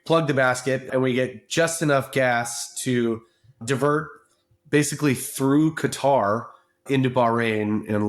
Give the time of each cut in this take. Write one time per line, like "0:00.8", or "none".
0:00.9
0:03.6
0:06.8